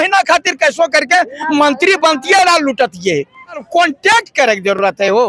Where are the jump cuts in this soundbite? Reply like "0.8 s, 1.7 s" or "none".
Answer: 3.6 s

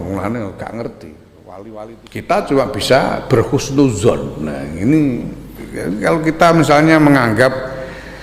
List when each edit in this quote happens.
2.0 s

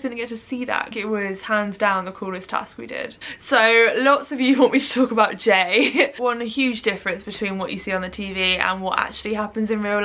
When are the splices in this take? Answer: 0.9 s, 3.1 s, 6.1 s

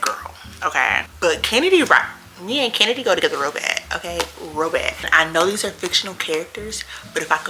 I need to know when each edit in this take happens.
1.1 s, 5.1 s

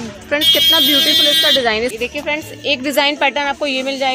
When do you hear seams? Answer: 1.9 s

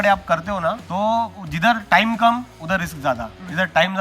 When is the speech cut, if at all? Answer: 0.8 s, 1.4 s, 3.0 s

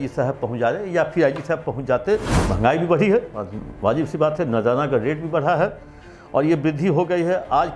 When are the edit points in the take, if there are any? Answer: 2.4 s

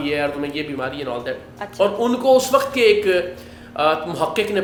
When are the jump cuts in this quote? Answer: none

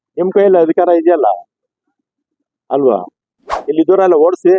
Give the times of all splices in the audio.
3.3 s

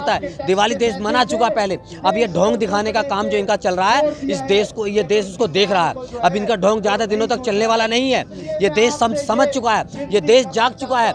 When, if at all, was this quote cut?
none

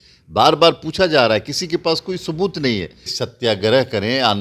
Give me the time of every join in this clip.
3.0 s

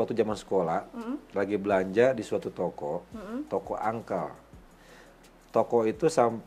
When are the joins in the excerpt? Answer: none

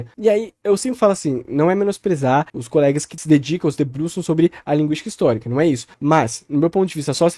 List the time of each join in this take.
2.8 s, 5.9 s

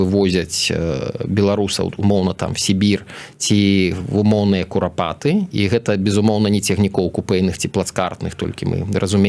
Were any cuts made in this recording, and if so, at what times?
none

